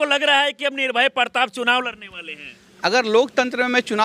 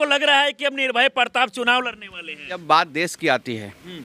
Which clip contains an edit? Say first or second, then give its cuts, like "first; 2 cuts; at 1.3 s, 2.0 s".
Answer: second; 1 cut; at 2.6 s